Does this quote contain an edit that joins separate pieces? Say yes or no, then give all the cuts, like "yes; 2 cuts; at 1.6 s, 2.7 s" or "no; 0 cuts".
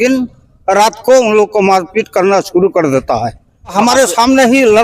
yes; 1 cut; at 3.7 s